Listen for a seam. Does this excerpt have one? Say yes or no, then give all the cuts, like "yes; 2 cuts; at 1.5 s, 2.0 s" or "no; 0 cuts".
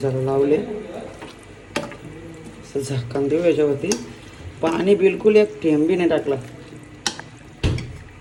no; 0 cuts